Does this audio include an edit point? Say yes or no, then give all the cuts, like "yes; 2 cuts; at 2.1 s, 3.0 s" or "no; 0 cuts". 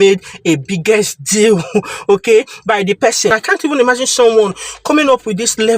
yes; 1 cut; at 3.3 s